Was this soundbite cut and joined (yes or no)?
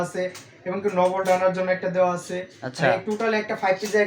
no